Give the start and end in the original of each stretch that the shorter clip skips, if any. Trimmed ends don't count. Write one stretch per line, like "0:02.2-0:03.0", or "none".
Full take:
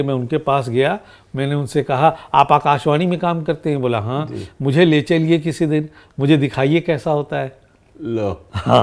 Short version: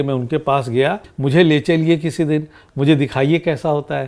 0:01.1-0:04.5